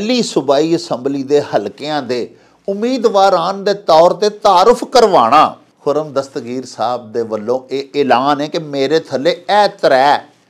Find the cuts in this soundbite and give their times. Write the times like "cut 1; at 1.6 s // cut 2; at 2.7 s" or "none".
cut 1; at 5.7 s